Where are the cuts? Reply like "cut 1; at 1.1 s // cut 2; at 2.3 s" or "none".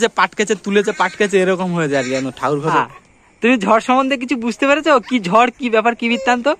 cut 1; at 2.7 s